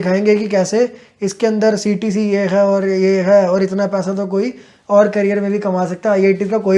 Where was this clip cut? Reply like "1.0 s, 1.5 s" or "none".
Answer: none